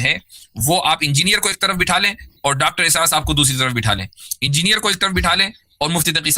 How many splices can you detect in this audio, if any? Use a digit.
0